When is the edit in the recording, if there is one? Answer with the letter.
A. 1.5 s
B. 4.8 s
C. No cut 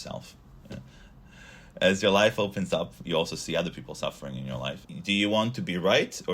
B